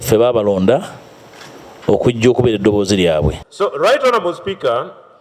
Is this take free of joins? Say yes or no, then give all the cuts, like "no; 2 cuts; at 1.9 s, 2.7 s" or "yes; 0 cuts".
no; 1 cut; at 3.4 s